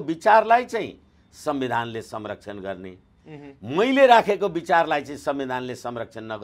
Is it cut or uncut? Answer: uncut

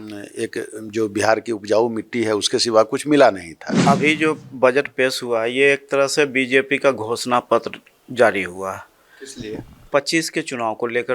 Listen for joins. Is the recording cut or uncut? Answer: cut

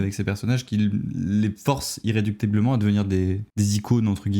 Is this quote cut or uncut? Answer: cut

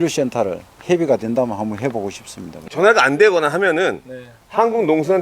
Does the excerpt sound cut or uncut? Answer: cut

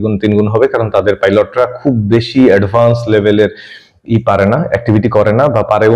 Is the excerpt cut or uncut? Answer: uncut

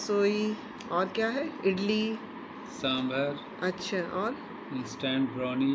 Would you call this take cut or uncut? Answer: uncut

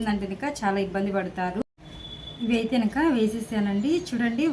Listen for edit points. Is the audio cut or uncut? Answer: cut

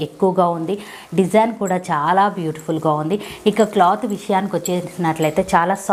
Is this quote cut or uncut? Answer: uncut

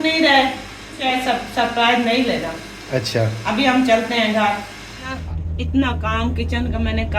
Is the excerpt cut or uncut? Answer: cut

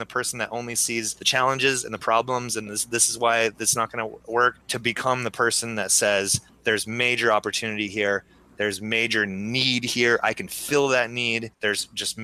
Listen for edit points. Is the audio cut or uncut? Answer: cut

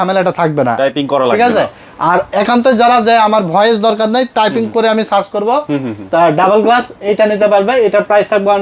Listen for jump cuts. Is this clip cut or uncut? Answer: uncut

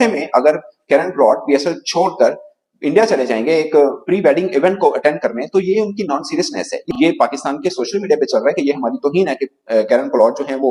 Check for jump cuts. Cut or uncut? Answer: uncut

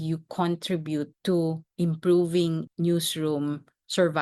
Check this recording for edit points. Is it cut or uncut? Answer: cut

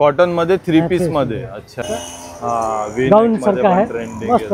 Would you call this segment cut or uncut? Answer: cut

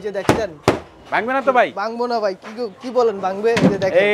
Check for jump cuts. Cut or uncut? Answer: uncut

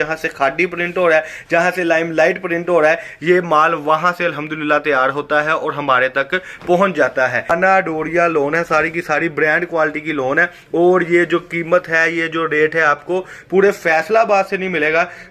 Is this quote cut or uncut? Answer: cut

